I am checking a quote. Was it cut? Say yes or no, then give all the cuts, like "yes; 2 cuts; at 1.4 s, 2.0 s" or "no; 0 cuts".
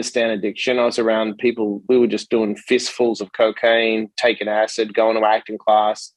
no; 0 cuts